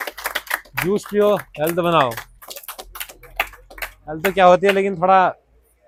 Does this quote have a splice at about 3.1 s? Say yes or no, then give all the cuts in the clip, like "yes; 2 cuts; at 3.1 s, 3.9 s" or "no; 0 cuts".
no; 0 cuts